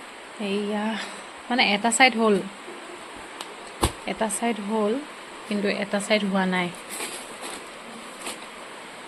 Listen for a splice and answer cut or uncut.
uncut